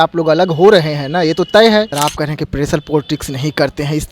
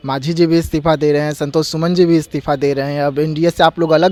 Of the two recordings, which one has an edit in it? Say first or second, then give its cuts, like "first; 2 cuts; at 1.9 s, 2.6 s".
first; 1 cut; at 1.9 s